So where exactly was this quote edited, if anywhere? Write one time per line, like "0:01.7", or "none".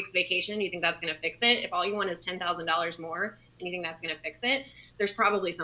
none